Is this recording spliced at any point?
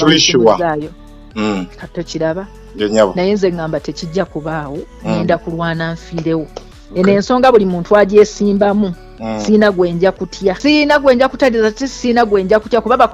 yes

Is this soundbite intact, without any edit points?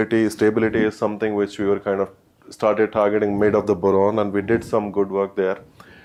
yes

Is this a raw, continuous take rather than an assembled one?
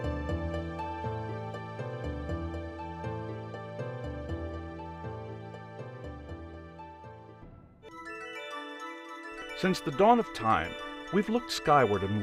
yes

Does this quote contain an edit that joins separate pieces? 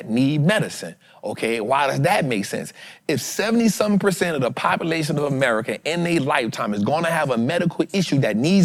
no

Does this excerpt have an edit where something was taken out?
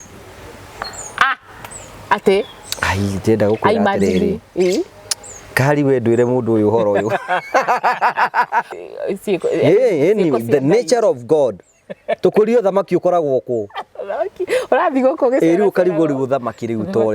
yes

